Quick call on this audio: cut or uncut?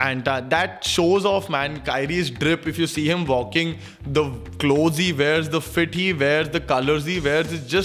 uncut